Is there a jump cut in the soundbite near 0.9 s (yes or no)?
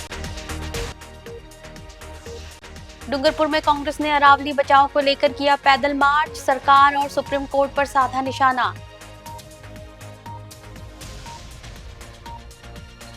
yes